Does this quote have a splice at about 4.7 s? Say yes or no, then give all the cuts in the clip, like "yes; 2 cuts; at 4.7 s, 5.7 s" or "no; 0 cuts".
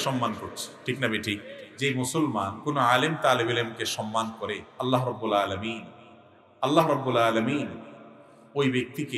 yes; 3 cuts; at 1.6 s, 2.6 s, 4.7 s